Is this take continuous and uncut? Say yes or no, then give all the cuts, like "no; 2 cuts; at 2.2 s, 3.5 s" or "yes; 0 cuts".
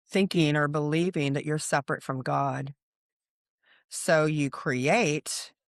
yes; 0 cuts